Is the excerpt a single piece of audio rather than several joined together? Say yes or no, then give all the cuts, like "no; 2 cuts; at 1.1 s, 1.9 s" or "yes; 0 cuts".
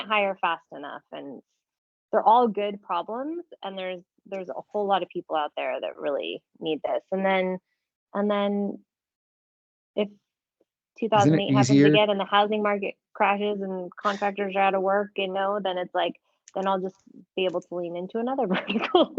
yes; 0 cuts